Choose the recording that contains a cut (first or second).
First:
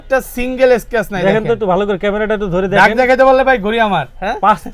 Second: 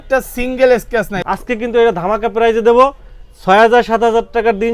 second